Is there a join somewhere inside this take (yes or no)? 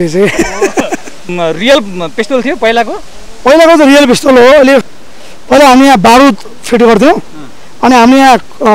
yes